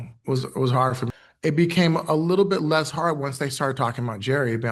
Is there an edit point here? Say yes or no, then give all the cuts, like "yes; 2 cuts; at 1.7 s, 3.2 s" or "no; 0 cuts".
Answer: yes; 1 cut; at 1.0 s